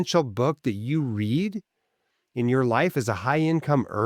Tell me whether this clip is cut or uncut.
uncut